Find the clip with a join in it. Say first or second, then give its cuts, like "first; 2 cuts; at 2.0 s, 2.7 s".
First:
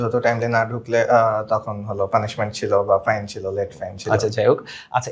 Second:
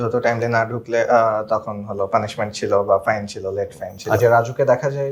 second; 1 cut; at 4.2 s